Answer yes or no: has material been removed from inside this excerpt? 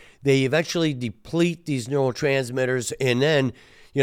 no